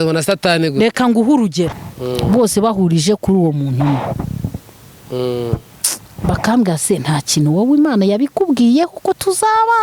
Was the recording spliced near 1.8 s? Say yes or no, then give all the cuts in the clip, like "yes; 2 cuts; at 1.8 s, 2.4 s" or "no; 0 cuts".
yes; 1 cut; at 1.8 s